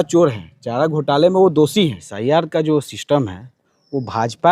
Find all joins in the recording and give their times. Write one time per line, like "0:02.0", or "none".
0:02.1